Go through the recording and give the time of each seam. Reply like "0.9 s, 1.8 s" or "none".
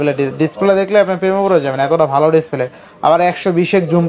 none

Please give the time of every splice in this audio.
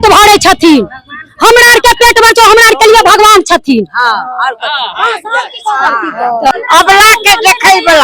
6.5 s

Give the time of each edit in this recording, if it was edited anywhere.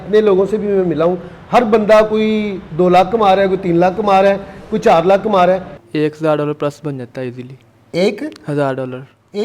5.8 s

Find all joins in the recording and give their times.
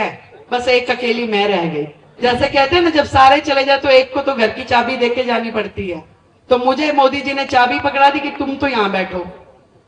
2.0 s

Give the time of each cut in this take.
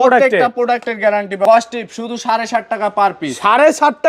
1.4 s

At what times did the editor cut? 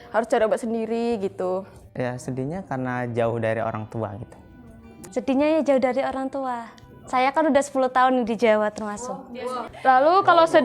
none

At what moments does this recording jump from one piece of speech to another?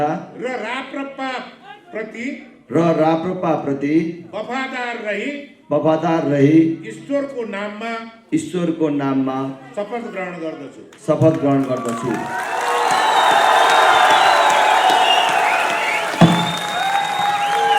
none

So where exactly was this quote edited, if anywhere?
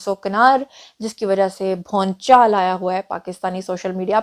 none

